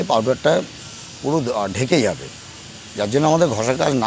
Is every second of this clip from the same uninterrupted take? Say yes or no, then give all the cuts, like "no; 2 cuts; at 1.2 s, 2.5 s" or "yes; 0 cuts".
yes; 0 cuts